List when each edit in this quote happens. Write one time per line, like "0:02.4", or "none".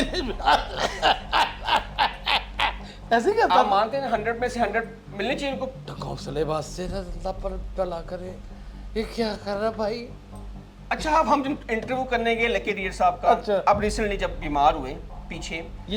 none